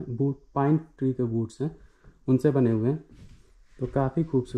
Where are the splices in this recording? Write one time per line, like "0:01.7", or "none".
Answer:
none